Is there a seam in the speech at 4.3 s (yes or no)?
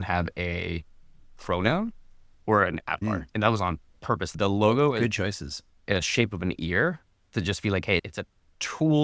yes